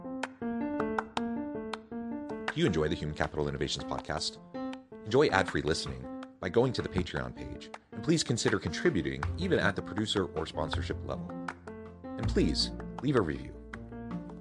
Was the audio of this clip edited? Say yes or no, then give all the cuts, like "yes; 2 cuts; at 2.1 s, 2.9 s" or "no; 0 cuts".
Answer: no; 0 cuts